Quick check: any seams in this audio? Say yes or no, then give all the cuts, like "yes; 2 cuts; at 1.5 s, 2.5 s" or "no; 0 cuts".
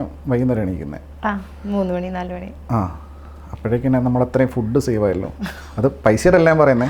no; 0 cuts